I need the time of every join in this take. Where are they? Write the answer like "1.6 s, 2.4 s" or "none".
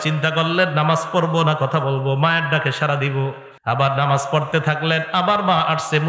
3.5 s